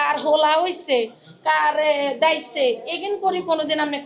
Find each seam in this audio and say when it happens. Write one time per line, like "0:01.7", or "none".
none